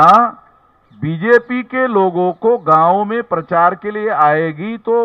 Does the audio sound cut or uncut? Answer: uncut